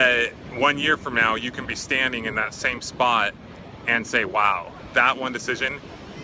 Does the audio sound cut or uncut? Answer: cut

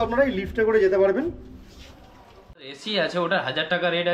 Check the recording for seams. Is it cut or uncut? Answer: cut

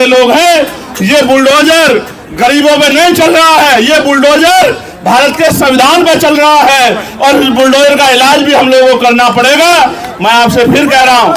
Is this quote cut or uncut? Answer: uncut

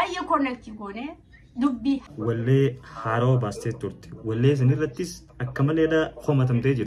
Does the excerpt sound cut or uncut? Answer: cut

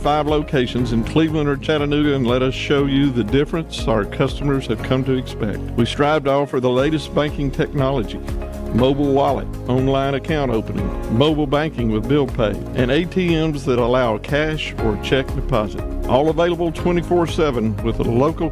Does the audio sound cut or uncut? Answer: uncut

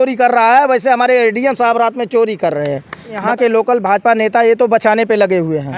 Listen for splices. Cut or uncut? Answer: cut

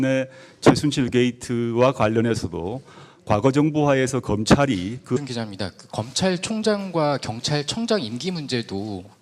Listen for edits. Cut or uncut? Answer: uncut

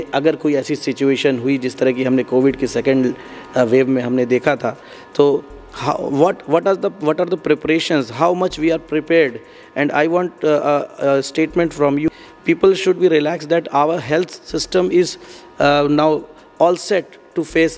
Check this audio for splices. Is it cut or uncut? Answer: cut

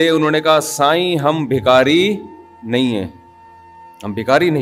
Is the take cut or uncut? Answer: uncut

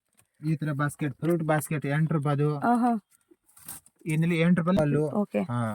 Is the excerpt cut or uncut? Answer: cut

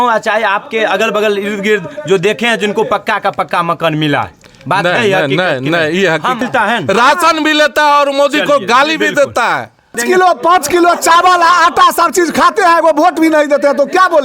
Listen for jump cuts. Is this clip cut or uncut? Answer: cut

